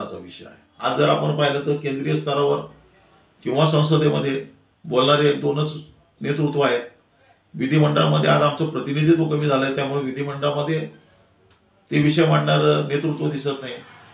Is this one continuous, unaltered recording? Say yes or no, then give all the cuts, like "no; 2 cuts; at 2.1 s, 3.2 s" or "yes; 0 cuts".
yes; 0 cuts